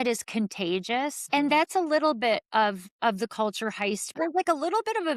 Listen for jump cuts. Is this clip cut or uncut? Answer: cut